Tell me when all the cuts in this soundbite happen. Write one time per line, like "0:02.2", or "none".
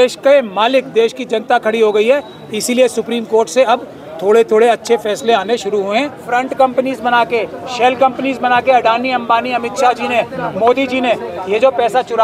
0:06.2